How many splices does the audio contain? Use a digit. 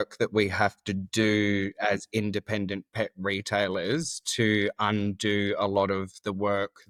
0